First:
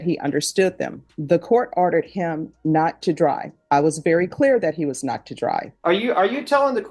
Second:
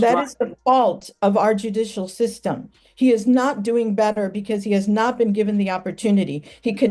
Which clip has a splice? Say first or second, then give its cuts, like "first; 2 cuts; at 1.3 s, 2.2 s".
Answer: first; 2 cuts; at 1.1 s, 5.7 s